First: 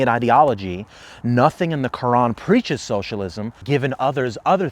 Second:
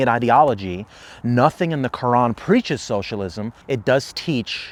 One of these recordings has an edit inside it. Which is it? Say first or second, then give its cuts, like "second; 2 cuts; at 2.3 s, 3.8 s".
first; 1 cut; at 3.5 s